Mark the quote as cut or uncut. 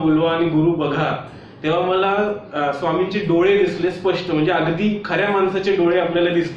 uncut